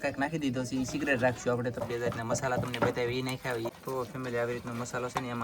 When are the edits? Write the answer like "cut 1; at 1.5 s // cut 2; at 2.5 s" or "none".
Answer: cut 1; at 1.8 s // cut 2; at 3.7 s